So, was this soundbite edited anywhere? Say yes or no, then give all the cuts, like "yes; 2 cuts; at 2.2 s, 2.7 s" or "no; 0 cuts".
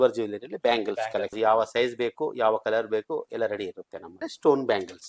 yes; 2 cuts; at 1.3 s, 4.3 s